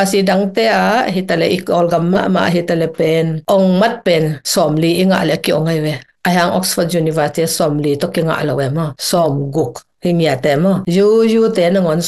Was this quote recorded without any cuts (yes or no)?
yes